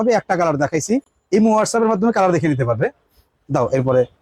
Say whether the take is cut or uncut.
uncut